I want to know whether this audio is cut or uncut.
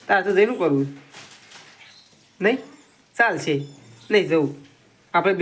uncut